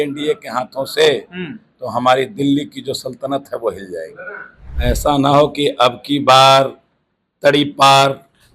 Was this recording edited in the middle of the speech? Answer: yes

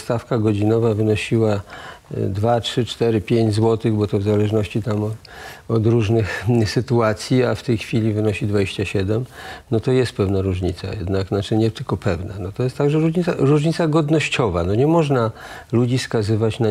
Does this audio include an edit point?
no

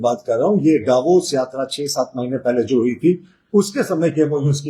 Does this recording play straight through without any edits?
yes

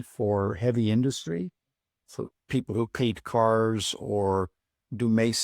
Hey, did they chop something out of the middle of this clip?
yes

